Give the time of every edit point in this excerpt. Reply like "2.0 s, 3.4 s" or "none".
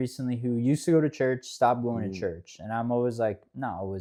none